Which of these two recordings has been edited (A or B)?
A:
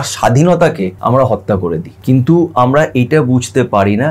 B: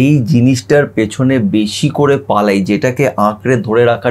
A